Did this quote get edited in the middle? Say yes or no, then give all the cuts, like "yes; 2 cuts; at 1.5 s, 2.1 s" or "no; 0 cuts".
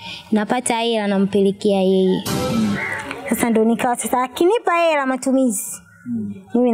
yes; 1 cut; at 2.3 s